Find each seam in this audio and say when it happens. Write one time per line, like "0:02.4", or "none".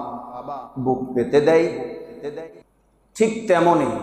0:02.5